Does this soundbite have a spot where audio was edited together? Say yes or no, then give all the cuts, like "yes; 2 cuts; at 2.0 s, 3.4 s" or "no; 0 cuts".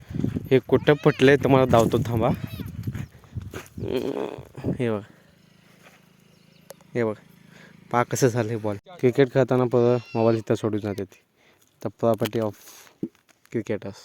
yes; 1 cut; at 8.9 s